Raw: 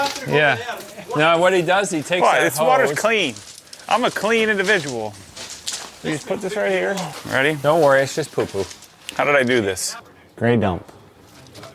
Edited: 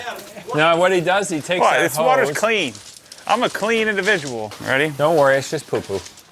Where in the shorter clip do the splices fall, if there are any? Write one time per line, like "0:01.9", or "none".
0:04.5